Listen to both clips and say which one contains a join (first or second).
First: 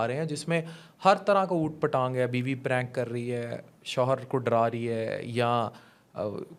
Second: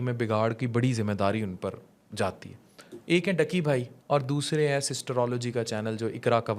second